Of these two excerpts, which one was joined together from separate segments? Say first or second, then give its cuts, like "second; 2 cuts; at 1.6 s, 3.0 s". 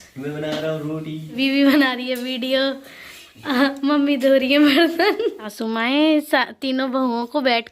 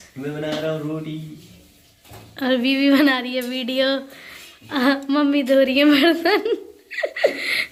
first; 2 cuts; at 1.4 s, 5.5 s